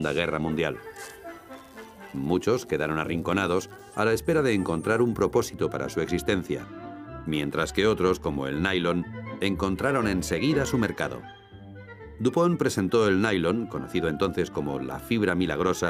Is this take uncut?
yes; 0 cuts

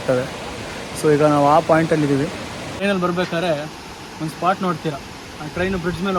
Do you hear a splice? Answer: no; 0 cuts

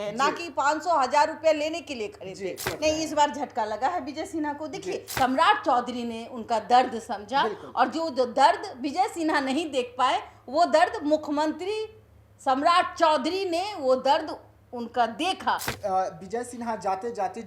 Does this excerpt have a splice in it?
yes; 3 cuts; at 2.7 s, 5.1 s, 15.7 s

